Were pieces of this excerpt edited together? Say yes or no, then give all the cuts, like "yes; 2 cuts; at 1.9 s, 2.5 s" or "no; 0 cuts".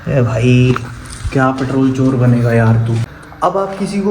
yes; 1 cut; at 3.1 s